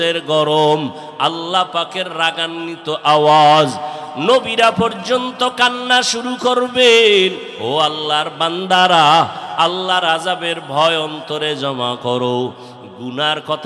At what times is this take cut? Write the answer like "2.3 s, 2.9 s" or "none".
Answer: 7.5 s

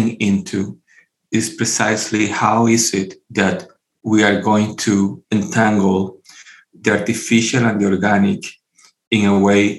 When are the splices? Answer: 3.2 s, 5.2 s

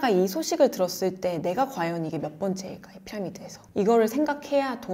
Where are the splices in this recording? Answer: none

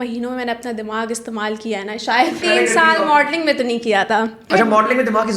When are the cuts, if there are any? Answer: 2.4 s, 4.4 s

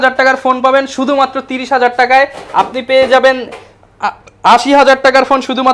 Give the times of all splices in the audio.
none

